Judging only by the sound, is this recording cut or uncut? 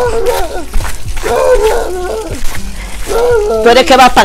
uncut